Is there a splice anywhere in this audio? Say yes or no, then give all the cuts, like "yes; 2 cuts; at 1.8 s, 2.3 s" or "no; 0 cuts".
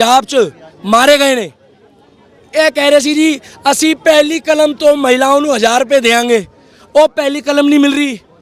no; 0 cuts